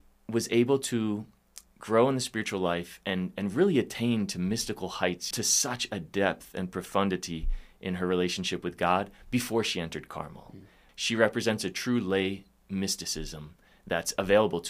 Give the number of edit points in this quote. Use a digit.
2